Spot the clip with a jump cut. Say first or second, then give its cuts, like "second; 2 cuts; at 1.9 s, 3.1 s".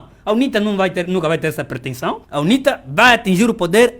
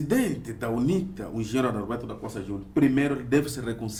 first; 1 cut; at 2.2 s